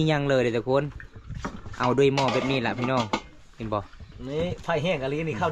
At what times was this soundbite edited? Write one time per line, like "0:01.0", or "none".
none